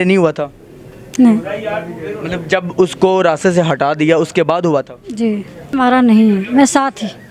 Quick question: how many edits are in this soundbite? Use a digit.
1